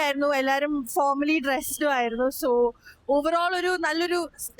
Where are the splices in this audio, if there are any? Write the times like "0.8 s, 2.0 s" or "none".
none